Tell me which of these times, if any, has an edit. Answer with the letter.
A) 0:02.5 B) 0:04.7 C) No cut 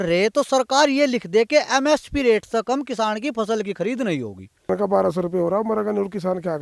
B